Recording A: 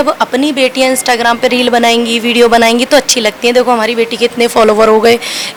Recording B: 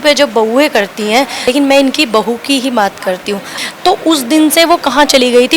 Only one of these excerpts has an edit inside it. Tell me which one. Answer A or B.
B